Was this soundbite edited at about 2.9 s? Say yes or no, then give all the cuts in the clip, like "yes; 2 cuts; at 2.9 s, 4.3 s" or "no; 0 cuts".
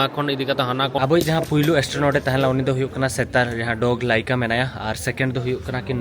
no; 1 cut; at 1.0 s